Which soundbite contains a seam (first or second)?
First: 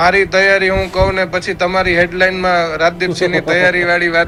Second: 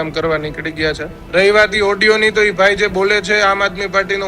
second